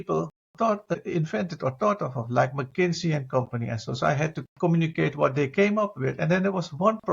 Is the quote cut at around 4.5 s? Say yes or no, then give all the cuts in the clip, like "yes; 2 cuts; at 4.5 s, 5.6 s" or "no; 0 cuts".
yes; 2 cuts; at 0.9 s, 4.5 s